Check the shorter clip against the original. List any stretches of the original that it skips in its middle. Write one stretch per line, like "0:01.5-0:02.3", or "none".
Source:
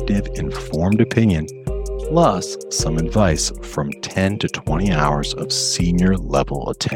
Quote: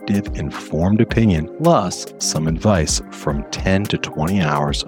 0:01.5-0:02.0